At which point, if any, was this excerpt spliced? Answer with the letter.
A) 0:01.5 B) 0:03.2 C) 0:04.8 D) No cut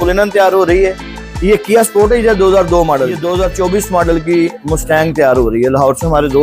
B